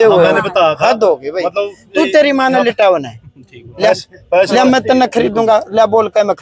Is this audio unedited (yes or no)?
yes